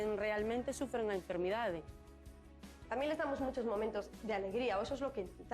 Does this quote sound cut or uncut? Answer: cut